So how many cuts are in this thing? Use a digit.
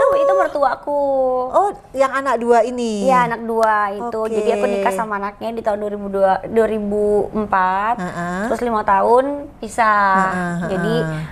0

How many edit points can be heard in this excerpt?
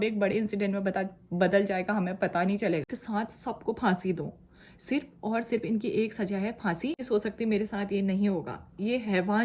2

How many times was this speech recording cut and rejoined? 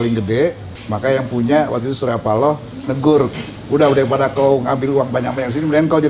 0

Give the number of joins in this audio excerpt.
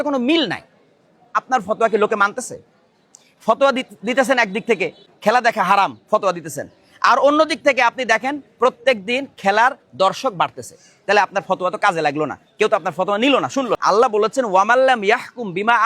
3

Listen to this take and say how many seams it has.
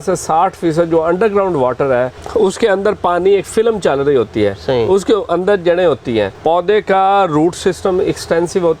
2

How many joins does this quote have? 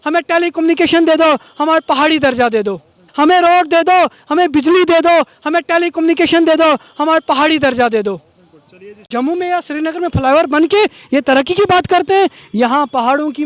2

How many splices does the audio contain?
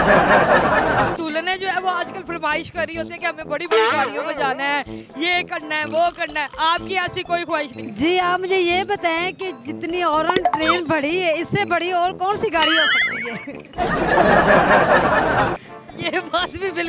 1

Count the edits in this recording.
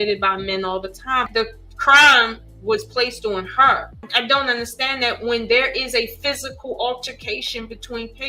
2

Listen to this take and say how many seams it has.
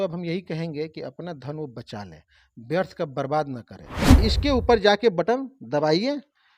1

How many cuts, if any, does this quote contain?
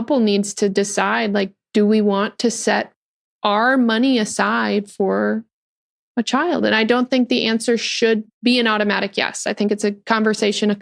1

